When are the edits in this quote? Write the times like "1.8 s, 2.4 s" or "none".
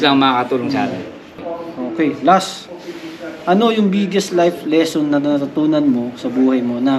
1.3 s